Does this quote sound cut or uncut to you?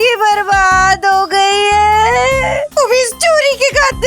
cut